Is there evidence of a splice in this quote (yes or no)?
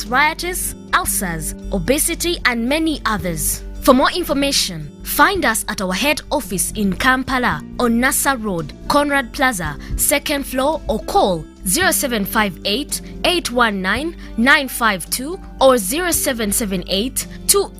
yes